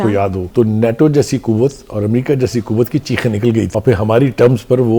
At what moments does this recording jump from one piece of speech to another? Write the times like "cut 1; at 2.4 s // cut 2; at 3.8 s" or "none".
none